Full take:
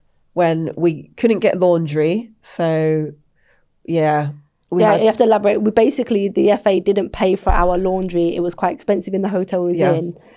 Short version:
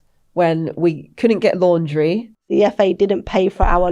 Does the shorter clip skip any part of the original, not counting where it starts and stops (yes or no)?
yes